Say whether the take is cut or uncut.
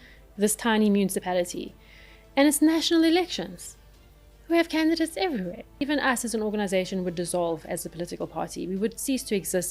cut